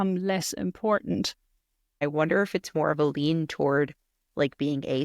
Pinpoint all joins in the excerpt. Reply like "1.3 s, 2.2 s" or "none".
2.0 s